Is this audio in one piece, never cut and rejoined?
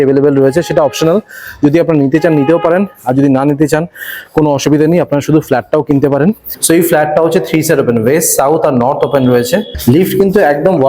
no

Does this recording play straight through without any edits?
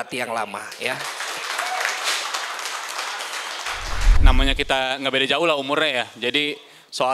no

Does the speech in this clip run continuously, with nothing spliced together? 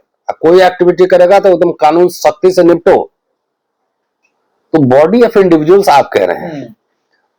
yes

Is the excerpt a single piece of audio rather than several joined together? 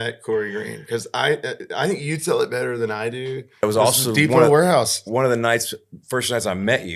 no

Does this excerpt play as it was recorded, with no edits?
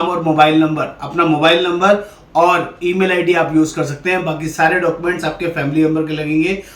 yes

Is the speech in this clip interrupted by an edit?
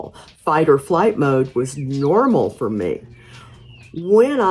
no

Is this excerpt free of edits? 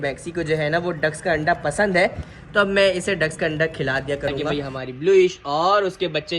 no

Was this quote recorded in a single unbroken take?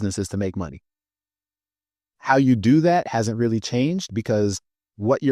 yes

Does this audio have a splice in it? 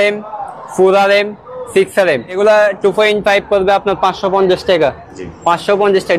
yes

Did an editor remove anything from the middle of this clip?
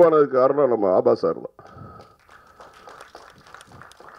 no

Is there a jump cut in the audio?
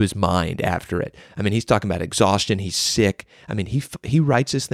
no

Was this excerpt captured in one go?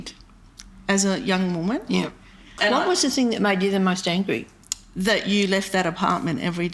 no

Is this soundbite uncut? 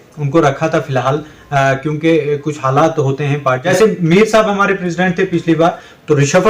no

